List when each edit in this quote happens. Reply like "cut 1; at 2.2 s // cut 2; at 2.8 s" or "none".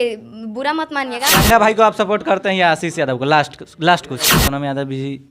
cut 1; at 1.3 s // cut 2; at 4.4 s